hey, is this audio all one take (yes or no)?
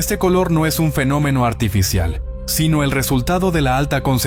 yes